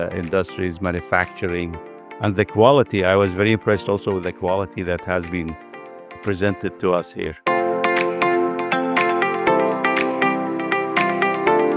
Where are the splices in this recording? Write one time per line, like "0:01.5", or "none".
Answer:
none